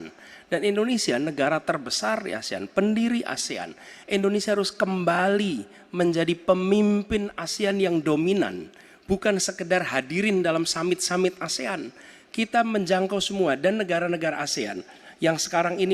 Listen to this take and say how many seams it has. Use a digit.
0